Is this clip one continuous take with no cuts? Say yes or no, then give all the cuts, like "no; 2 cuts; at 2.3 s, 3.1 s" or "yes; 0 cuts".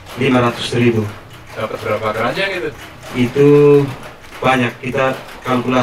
yes; 0 cuts